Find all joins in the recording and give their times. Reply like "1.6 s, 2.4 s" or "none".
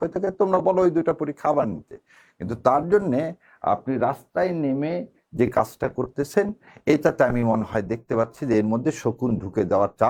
none